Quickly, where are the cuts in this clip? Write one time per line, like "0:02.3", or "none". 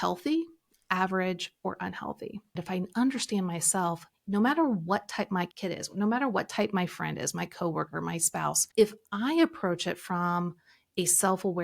0:02.6
0:05.5
0:08.6